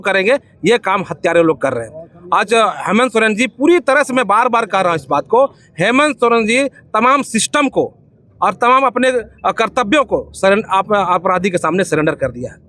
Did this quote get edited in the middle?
no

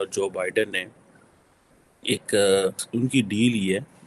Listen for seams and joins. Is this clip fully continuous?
no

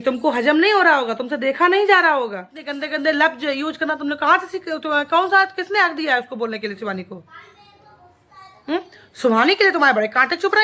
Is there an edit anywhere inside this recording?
yes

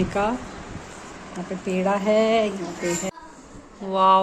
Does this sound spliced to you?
yes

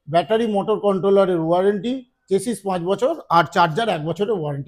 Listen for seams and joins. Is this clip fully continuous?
yes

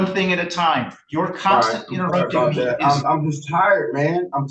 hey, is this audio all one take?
yes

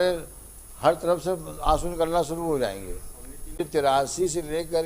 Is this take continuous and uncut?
no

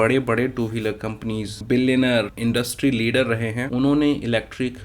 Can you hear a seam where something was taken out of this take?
yes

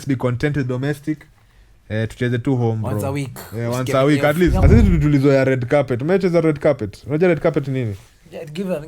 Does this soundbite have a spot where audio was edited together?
yes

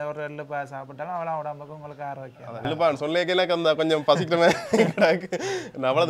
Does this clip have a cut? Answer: yes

